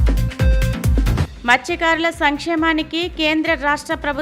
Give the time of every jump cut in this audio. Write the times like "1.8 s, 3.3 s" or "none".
none